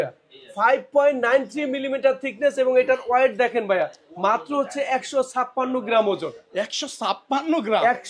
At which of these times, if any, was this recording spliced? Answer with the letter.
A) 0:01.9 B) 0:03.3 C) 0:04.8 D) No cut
D